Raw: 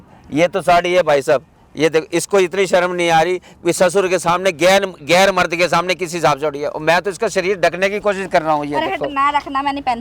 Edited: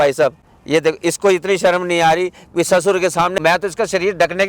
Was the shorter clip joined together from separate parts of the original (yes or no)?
yes